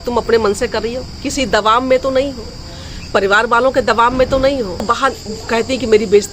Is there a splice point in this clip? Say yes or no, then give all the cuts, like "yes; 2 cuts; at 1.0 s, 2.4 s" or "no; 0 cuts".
yes; 1 cut; at 4.8 s